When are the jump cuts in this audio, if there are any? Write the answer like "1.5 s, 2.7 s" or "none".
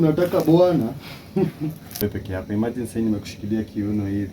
2.0 s